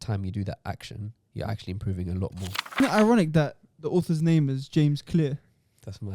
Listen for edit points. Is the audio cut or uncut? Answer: cut